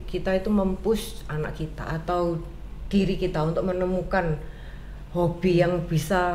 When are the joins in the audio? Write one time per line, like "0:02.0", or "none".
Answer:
none

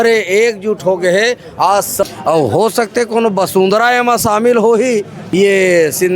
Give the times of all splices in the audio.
0:02.1
0:05.2

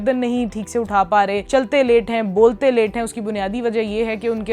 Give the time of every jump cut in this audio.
0:01.4

